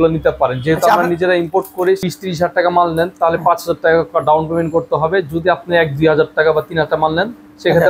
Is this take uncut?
no; 1 cut; at 2.0 s

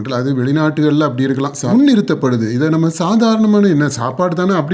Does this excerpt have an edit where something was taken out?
yes; 1 cut; at 1.7 s

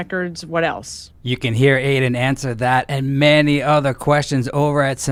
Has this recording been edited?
no; 0 cuts

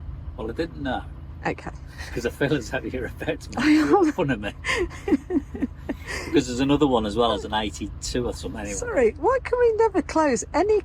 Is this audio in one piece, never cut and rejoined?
yes; 0 cuts

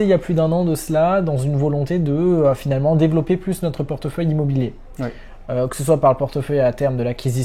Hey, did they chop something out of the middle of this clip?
no; 0 cuts

